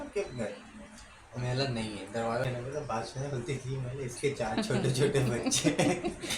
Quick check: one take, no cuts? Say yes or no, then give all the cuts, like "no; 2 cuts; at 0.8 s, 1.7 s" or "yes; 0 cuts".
no; 1 cut; at 2.4 s